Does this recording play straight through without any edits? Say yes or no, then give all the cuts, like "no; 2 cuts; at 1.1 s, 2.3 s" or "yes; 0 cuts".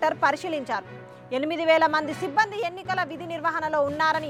yes; 0 cuts